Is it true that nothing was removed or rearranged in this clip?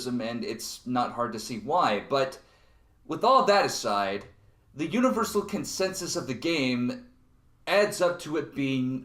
no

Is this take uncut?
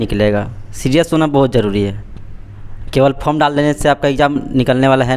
yes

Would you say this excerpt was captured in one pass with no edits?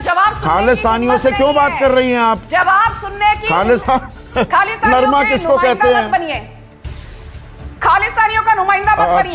no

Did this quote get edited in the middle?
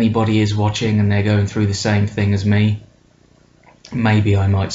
yes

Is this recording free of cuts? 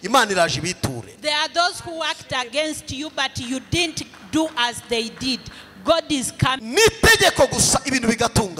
no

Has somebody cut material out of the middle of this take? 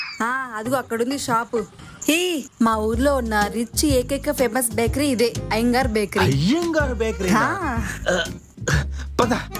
yes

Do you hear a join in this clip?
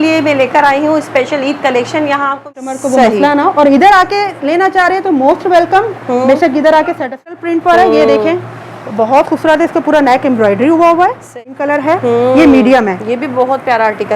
yes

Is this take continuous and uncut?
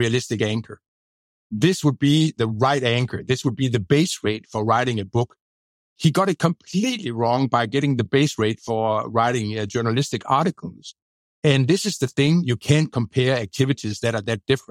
yes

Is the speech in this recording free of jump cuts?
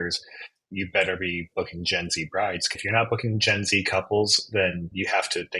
no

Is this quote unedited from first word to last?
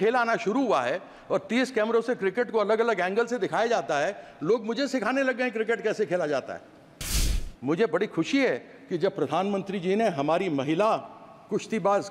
no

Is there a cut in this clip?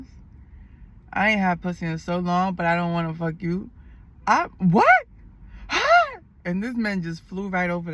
no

